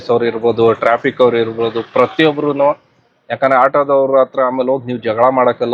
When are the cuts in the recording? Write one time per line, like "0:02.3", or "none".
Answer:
none